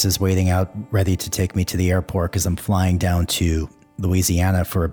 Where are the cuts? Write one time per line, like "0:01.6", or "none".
none